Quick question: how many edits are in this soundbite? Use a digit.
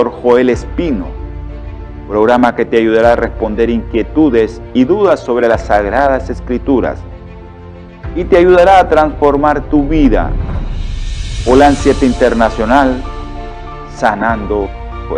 0